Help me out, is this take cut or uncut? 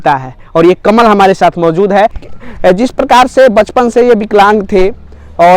cut